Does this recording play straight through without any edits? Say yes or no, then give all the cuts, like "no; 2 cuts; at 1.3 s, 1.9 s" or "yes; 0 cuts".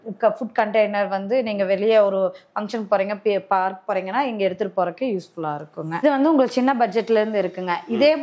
yes; 0 cuts